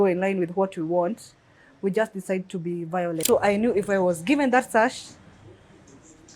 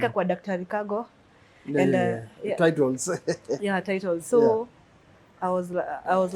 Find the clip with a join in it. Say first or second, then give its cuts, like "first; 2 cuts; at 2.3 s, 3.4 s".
first; 1 cut; at 3.2 s